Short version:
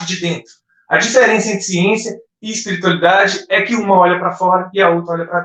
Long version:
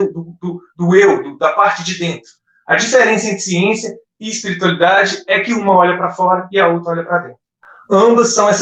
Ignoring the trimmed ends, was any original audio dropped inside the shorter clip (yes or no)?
no